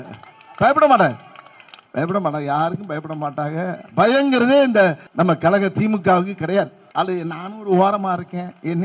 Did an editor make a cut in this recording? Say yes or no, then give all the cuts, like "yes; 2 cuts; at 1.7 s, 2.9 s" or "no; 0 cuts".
yes; 2 cuts; at 5.0 s, 6.8 s